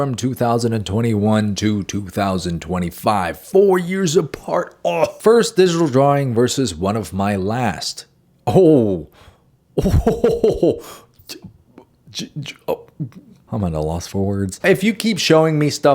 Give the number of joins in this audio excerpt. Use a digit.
2